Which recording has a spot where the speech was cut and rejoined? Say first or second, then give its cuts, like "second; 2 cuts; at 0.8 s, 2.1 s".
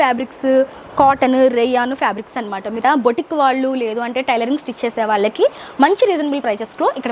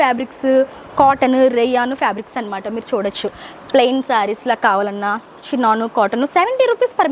first; 1 cut; at 2.8 s